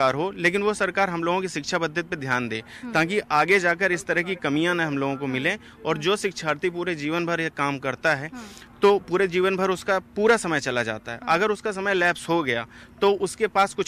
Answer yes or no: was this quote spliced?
no